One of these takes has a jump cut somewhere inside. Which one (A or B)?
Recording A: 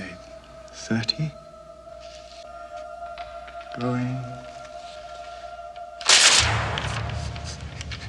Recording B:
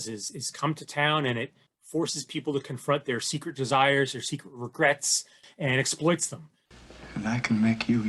B